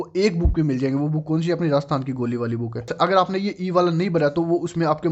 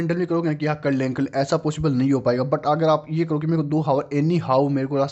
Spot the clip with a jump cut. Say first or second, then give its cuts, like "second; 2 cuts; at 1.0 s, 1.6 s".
first; 1 cut; at 2.9 s